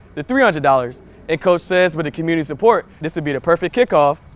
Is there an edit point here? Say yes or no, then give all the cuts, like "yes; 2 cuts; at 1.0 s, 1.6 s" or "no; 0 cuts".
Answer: no; 0 cuts